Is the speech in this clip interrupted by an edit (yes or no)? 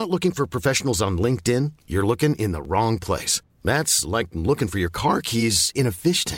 no